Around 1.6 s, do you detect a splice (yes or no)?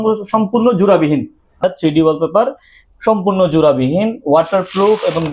yes